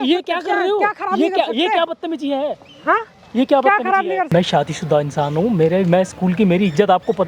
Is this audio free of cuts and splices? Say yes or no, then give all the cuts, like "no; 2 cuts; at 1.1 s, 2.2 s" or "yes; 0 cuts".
yes; 0 cuts